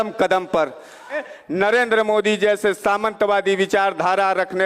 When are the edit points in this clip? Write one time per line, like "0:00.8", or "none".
0:01.2